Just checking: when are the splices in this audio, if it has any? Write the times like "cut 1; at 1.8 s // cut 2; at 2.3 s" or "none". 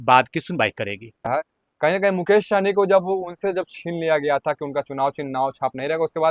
none